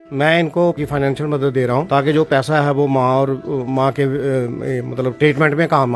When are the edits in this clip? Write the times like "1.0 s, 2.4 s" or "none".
0.8 s, 1.9 s